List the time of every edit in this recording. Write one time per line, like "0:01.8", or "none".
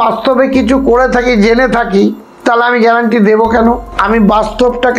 0:03.9